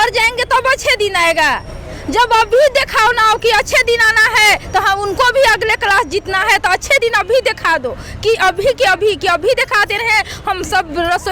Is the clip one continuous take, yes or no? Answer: yes